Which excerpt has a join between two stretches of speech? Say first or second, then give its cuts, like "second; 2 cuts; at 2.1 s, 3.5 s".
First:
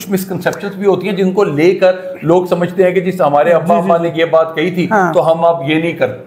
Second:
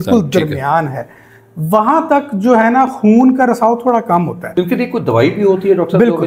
second; 1 cut; at 4.4 s